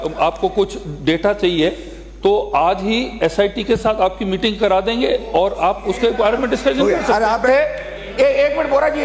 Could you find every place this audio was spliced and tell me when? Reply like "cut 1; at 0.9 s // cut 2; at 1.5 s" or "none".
cut 1; at 7.4 s